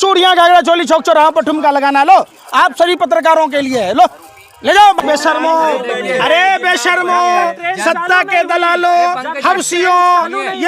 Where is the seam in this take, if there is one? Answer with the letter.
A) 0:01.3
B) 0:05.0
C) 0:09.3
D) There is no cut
B